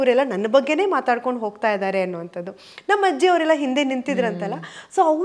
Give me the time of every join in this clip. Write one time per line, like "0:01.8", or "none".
none